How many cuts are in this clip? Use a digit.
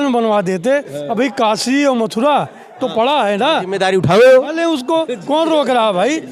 0